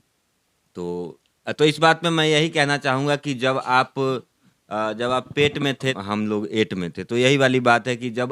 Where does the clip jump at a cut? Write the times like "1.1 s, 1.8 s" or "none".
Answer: 6.0 s